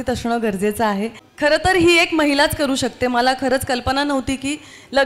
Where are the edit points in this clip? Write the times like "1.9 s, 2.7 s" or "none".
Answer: 1.2 s